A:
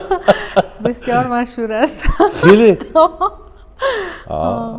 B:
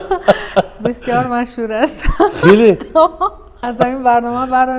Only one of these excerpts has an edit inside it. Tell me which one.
B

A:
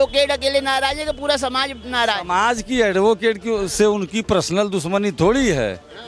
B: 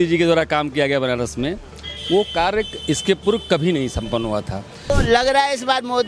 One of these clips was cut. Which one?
B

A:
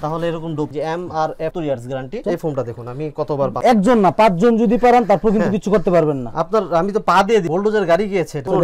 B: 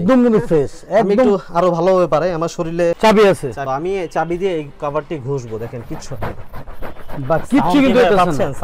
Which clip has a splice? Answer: B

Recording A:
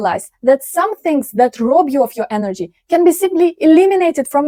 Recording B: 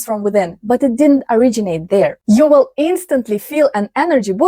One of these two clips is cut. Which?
B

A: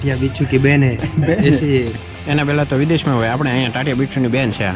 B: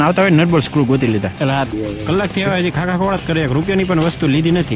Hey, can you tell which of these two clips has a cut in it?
B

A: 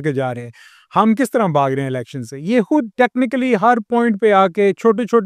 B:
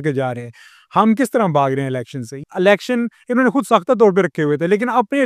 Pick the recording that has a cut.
B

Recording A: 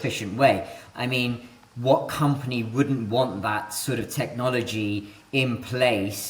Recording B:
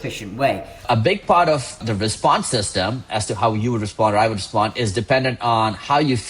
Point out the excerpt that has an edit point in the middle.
B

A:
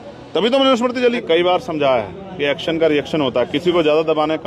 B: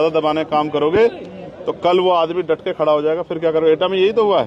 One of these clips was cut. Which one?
A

